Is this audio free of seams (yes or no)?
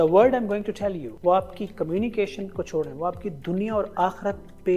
no